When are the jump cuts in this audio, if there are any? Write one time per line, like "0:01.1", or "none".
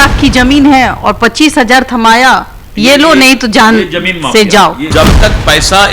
0:04.8